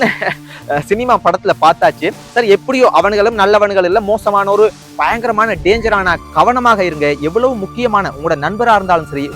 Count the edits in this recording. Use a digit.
1